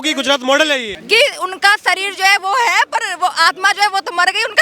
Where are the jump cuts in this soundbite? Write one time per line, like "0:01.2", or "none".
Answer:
0:00.9